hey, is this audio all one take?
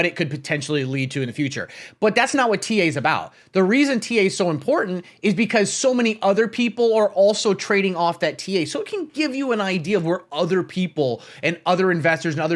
yes; 0 cuts

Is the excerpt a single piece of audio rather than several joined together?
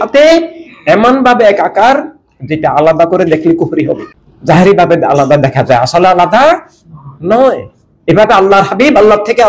yes; 0 cuts

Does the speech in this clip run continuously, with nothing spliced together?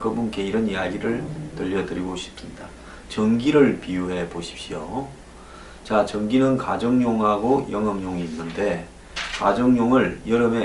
no; 1 cut; at 3.8 s

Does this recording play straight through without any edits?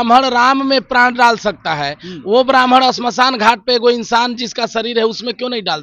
yes; 0 cuts

